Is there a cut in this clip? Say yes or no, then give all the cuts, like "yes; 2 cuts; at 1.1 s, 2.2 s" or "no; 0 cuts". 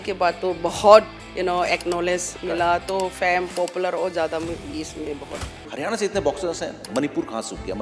yes; 2 cuts; at 1.3 s, 5.6 s